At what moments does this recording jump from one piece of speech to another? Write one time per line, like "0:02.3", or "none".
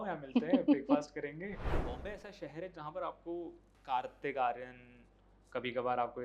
0:01.8
0:03.7